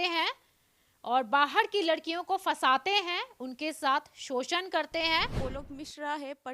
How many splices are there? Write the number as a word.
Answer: one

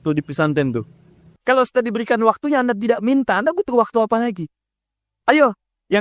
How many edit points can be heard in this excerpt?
one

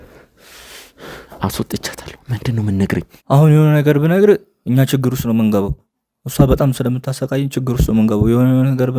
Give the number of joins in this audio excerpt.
one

